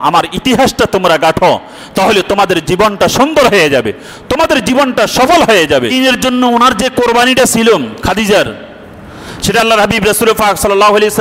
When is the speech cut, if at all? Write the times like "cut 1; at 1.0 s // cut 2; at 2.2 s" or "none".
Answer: cut 1; at 5.9 s